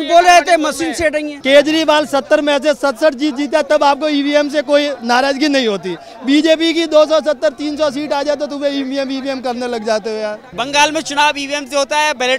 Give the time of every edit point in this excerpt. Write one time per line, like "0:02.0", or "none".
0:01.4
0:10.5